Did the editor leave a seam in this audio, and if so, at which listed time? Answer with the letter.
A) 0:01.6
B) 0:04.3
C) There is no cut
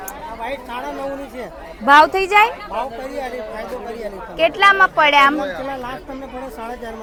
C